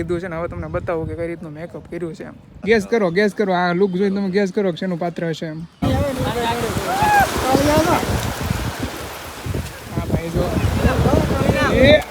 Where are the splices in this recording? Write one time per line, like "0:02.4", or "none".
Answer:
0:02.5
0:05.8